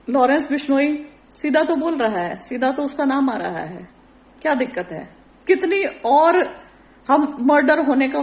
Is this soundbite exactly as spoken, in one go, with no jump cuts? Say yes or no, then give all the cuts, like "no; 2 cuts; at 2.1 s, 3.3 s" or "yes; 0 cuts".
yes; 0 cuts